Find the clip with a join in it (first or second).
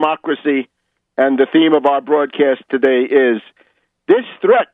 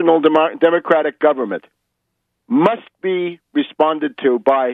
first